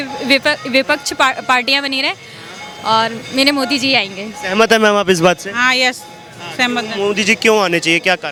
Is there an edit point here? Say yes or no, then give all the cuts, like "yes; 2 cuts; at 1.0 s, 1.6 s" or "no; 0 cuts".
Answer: no; 0 cuts